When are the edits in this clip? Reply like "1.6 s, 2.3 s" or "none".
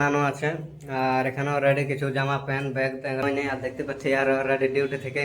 3.2 s